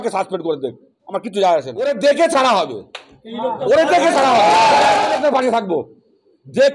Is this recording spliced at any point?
yes; 2 cuts; at 1.9 s, 5.1 s

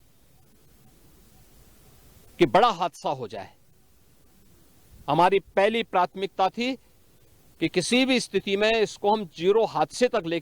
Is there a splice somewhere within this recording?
no; 0 cuts

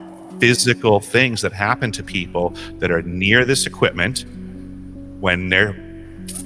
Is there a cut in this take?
no; 0 cuts

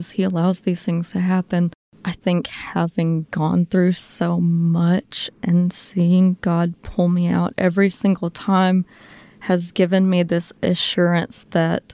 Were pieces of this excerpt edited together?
yes; 1 cut; at 1.9 s

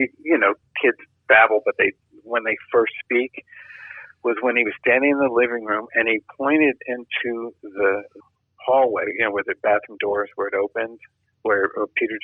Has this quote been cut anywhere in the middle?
no; 0 cuts

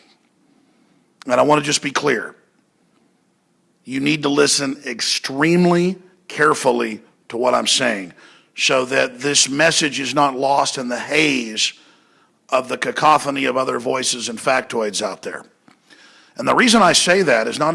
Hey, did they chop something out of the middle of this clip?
yes; 1 cut; at 16.5 s

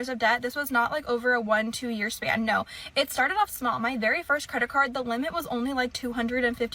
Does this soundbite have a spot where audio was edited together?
no; 0 cuts

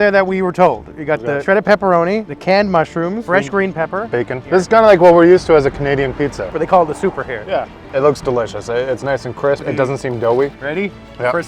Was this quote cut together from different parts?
yes; 8 cuts; at 1.4 s, 2.3 s, 3.2 s, 4.4 s, 6.4 s, 7.8 s, 9.6 s, 10.6 s

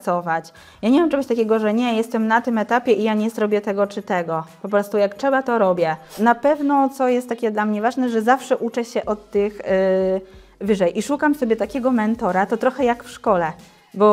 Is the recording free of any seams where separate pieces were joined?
no; 1 cut; at 6.1 s

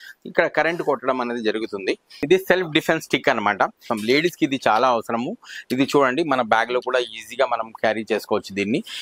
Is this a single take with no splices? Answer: no; 2 cuts; at 2.2 s, 3.9 s

